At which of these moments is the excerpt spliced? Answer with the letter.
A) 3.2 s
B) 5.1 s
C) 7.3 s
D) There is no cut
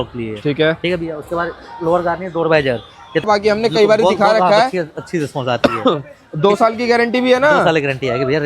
A